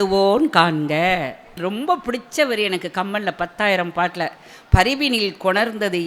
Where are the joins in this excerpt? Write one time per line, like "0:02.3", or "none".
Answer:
0:01.6